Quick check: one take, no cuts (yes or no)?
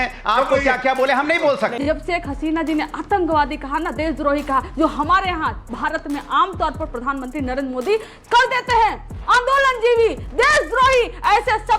no